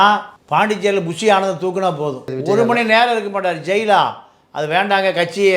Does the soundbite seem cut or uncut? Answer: cut